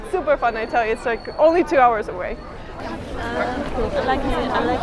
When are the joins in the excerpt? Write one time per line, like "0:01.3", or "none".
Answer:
0:02.8

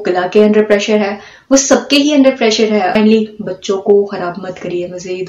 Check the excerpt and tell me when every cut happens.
0:02.9

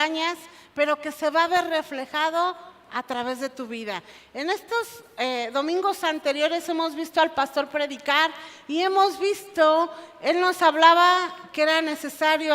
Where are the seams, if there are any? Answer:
0:03.8

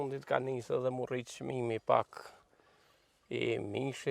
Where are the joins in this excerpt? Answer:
none

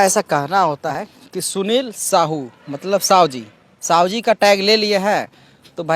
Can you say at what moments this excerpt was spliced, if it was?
0:00.9

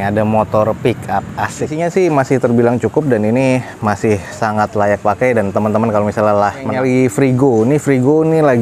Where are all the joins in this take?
0:01.7
0:06.7

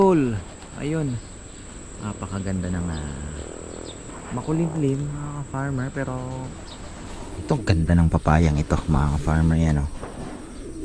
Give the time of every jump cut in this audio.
0:07.3

